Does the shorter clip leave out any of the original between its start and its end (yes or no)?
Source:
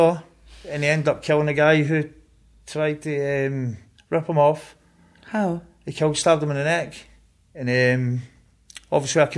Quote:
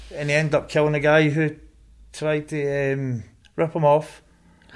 no